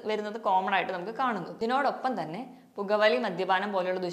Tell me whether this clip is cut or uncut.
cut